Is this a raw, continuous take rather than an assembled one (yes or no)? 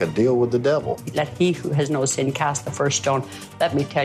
no